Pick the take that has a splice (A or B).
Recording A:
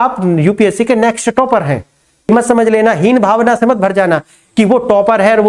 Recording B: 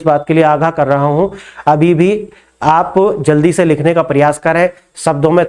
A